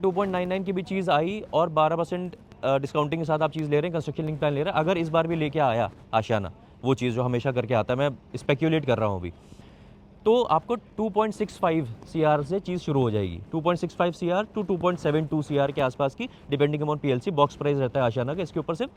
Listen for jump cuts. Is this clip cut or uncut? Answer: uncut